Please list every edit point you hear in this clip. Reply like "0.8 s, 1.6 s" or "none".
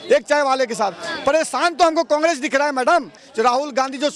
3.2 s